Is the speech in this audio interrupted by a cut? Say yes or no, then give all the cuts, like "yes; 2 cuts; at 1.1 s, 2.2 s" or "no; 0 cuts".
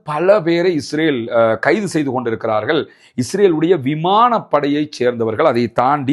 no; 0 cuts